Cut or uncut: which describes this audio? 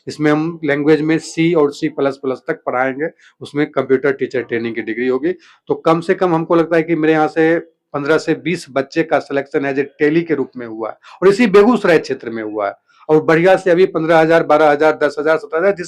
cut